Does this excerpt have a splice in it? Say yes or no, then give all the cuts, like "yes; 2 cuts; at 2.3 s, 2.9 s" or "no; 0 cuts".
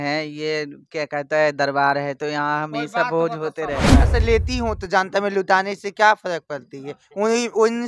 yes; 1 cut; at 4.0 s